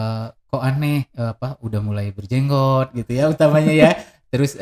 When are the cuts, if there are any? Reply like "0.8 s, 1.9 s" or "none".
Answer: none